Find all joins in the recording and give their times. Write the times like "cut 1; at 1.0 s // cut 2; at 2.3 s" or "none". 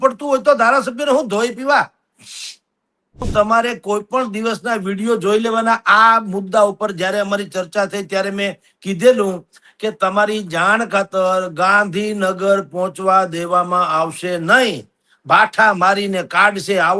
cut 1; at 3.3 s